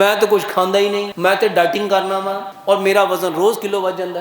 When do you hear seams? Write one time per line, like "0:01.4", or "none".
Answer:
0:01.1
0:02.5